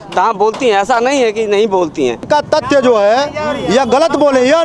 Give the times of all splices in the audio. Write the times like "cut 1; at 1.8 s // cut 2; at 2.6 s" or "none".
cut 1; at 2.2 s